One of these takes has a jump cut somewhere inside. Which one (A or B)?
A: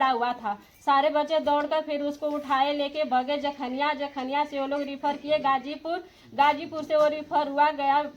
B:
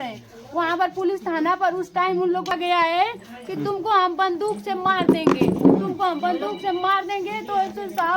B